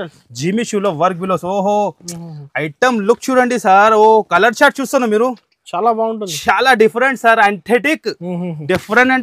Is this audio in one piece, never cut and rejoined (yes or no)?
yes